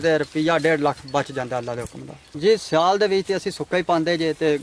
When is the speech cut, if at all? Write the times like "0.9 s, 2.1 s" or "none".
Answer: 2.4 s